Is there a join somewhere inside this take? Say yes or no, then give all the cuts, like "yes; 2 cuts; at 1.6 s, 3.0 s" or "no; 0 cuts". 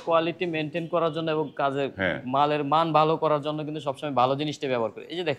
no; 0 cuts